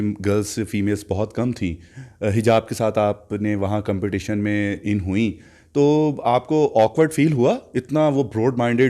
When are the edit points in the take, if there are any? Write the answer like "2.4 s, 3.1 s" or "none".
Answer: none